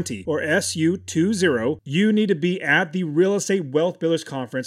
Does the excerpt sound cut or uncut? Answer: cut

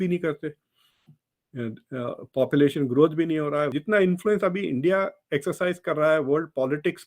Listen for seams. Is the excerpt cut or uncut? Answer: cut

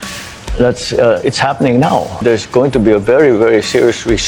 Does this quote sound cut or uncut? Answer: uncut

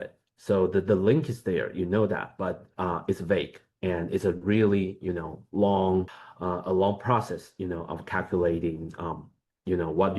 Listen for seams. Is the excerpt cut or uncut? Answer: cut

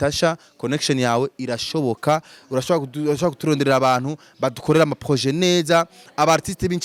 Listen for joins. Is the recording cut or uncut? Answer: uncut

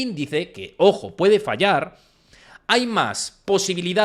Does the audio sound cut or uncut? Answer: uncut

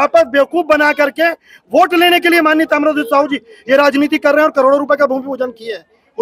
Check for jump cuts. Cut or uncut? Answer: uncut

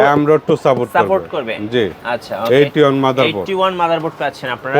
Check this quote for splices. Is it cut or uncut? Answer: uncut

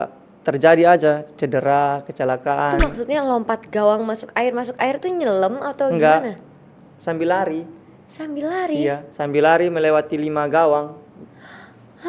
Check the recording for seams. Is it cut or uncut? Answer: cut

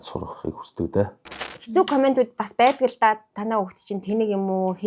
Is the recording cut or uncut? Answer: cut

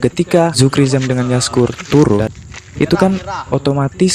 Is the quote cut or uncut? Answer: cut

